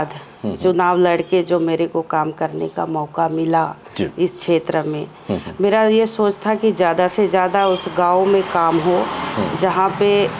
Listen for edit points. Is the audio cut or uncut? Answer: uncut